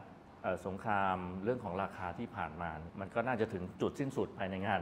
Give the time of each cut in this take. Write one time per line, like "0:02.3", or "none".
0:02.8